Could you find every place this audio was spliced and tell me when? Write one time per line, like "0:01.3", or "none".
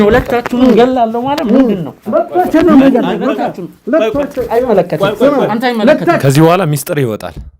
0:06.2

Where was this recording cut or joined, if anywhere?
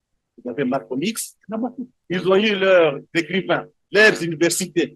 0:01.9
0:03.8

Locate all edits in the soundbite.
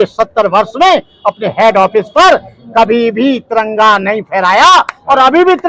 none

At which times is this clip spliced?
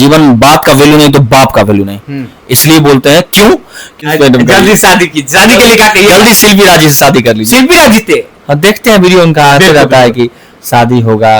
0:04.0

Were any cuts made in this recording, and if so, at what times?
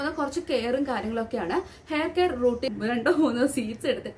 0:02.7

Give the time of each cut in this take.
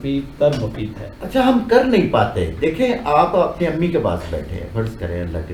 none

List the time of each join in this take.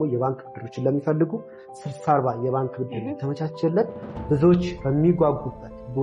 0:04.8

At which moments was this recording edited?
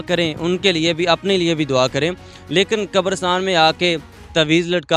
none

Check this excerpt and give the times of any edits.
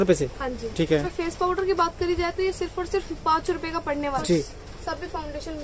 0:01.1
0:04.2

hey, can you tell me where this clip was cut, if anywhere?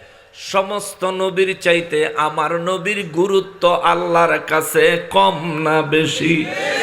none

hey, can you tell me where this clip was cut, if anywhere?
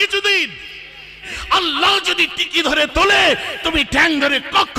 0:01.2

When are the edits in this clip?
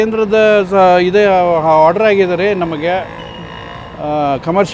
none

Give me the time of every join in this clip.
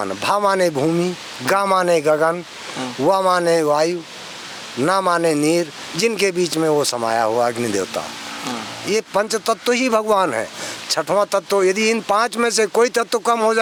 none

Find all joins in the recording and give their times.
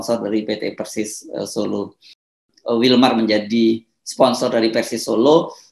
0:02.4

